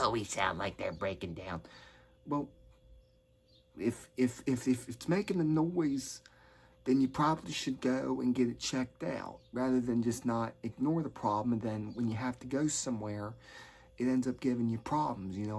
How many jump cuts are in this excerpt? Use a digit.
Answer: 0